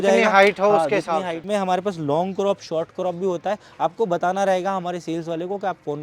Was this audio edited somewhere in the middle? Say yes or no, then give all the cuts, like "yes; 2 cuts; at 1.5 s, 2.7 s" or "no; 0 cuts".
yes; 1 cut; at 1.4 s